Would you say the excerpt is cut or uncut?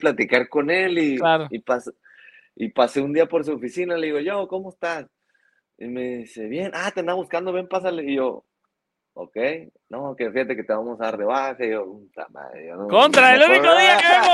uncut